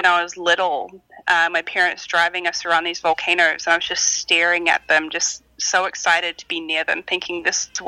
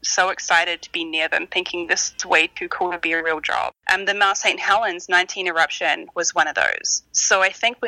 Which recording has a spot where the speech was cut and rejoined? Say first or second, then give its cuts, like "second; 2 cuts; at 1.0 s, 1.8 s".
second; 1 cut; at 3.8 s